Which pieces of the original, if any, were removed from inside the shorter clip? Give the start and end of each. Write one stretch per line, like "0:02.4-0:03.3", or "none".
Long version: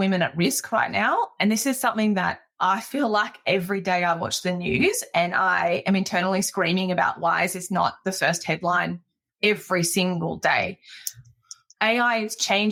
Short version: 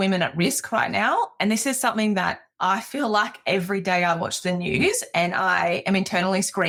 none